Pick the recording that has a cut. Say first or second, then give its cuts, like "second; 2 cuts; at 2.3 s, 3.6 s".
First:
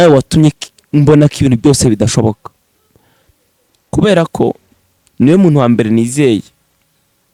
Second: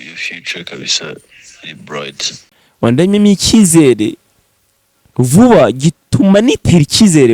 second; 1 cut; at 2.7 s